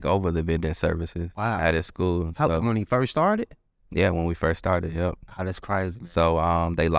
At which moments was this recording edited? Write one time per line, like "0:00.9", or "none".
0:01.2